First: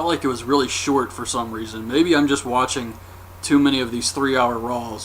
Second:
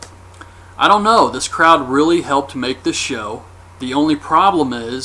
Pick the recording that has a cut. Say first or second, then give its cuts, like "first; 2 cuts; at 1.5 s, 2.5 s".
first; 1 cut; at 2.6 s